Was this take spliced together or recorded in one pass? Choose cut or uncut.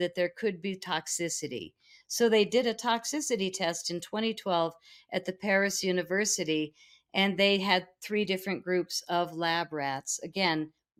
uncut